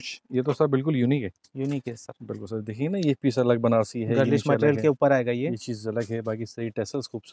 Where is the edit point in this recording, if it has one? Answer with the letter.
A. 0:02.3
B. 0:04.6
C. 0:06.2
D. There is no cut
D